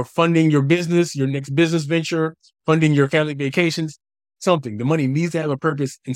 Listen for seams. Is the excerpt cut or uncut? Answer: uncut